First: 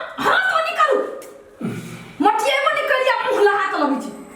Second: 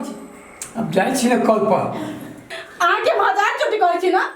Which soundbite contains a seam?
second; 1 cut; at 2.6 s

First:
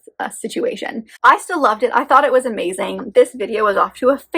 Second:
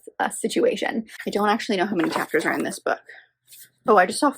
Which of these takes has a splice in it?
second; 1 cut; at 1.0 s

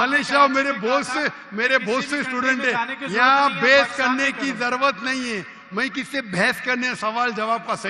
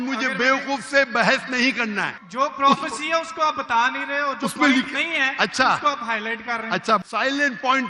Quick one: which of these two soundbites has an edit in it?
second; 2 cuts; at 2.2 s, 7.1 s

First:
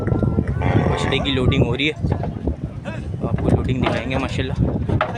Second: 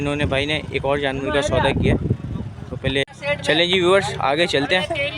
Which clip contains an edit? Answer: second; 1 cut; at 3.0 s

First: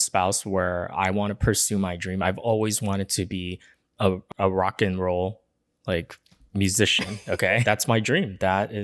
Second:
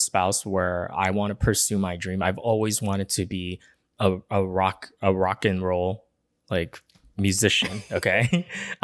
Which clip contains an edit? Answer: first; 2 cuts; at 4.2 s, 7.6 s

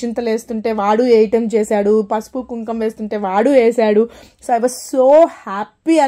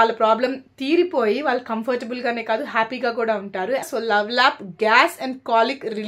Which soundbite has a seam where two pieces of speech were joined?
second; 1 cut; at 3.9 s

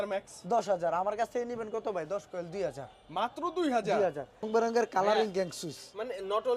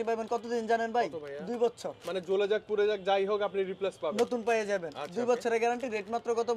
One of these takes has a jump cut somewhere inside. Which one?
first; 1 cut; at 4.5 s

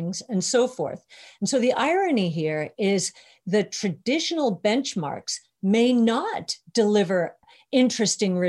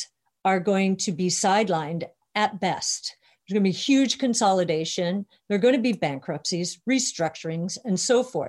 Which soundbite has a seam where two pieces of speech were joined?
first; 1 cut; at 7.4 s

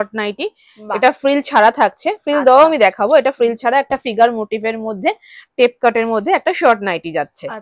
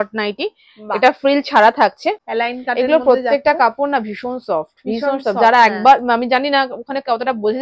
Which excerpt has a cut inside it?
second; 1 cut; at 2.2 s

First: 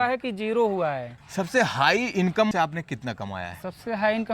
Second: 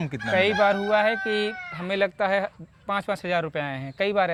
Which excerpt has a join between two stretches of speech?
first; 2 cuts; at 1.1 s, 2.5 s

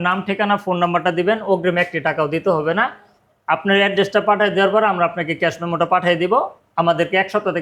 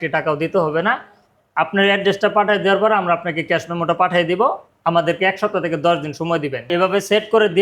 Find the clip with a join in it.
second; 1 cut; at 6.7 s

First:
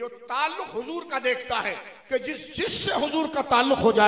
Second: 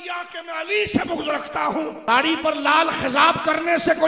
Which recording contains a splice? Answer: second; 1 cut; at 2.0 s

